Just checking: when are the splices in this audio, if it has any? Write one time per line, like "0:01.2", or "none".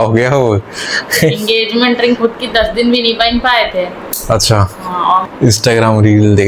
0:05.3